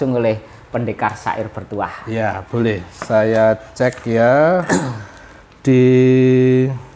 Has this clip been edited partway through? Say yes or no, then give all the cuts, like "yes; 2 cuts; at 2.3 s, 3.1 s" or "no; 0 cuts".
no; 0 cuts